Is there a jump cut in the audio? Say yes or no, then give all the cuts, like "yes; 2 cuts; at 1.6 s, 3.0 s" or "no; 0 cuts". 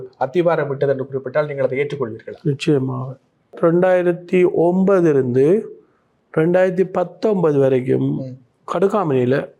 yes; 1 cut; at 3.5 s